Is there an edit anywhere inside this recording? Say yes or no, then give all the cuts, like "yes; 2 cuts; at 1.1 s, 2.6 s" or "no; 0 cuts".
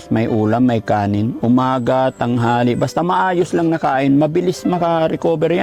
no; 0 cuts